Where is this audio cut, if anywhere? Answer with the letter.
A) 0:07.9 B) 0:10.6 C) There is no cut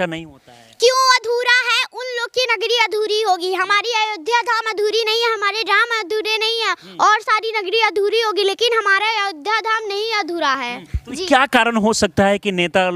C